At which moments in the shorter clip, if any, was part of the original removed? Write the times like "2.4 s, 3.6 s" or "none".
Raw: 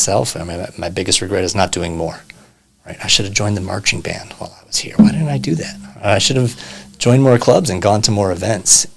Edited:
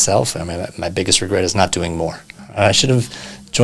2.3 s